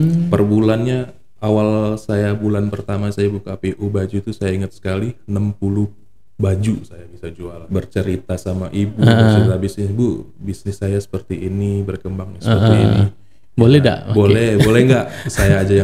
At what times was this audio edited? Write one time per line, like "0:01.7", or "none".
0:07.6